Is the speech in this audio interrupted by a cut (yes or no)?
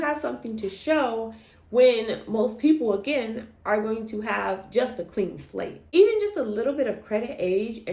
no